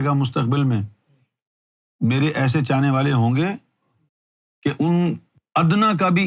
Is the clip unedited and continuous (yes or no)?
no